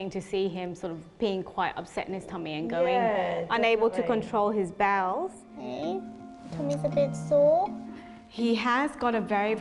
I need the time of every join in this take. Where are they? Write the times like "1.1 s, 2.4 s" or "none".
5.5 s